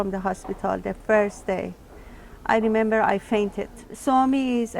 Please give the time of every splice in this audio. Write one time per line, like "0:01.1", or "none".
0:03.9